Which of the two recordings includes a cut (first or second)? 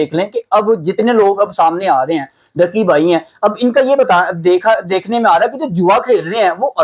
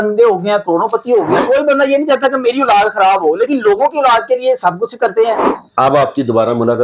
second